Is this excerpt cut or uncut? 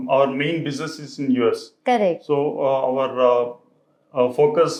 uncut